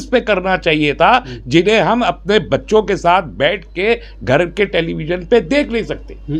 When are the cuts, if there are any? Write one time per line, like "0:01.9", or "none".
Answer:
none